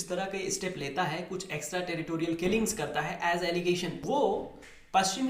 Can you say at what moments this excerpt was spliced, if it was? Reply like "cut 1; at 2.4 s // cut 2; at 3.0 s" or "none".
cut 1; at 4.0 s